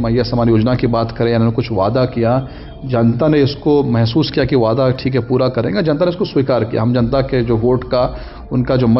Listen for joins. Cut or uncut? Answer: uncut